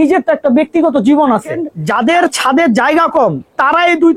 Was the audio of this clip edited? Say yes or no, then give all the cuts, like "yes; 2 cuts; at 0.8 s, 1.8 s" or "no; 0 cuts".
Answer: yes; 1 cut; at 1.8 s